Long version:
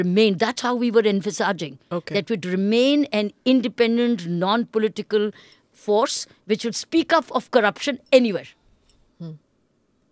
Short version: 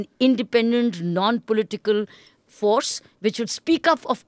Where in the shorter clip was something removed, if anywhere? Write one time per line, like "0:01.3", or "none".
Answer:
none